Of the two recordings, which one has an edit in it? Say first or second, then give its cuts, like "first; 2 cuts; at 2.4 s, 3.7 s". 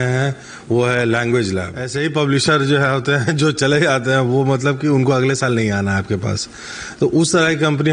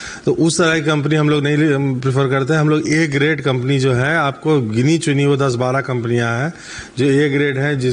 first; 1 cut; at 1.8 s